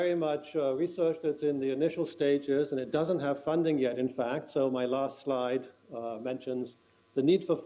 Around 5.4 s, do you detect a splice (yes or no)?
no